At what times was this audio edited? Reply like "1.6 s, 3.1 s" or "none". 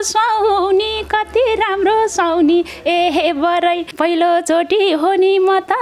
3.9 s